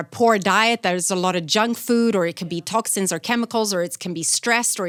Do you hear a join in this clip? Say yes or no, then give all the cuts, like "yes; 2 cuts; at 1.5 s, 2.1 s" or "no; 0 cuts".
no; 0 cuts